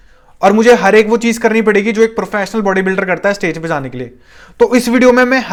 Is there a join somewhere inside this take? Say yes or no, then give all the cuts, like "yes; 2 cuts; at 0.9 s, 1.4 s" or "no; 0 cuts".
no; 0 cuts